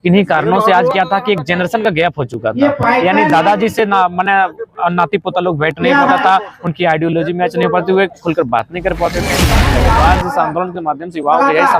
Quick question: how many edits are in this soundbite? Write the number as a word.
one